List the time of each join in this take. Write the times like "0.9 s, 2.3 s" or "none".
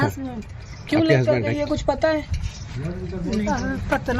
2.1 s